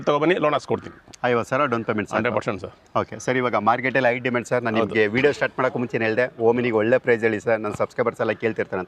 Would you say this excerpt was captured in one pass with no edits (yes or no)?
yes